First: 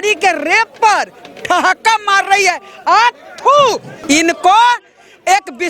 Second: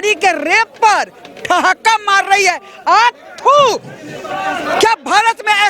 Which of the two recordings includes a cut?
first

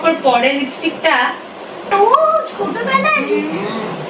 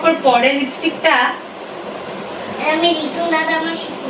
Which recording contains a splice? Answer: first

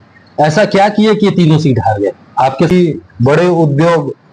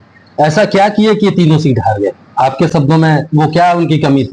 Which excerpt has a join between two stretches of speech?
first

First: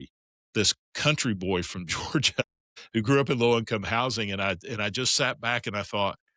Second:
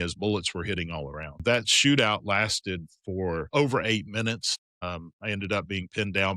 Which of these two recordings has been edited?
second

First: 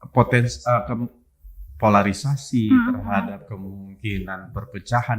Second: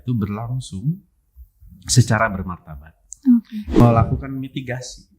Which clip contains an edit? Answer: second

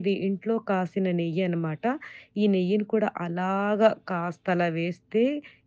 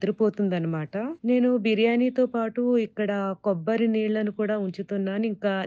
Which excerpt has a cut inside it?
second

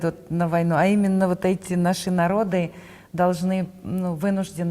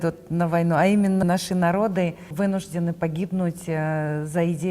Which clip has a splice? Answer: second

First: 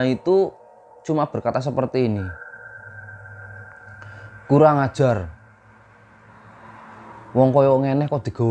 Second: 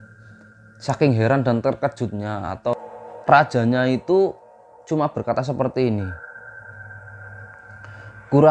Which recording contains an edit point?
second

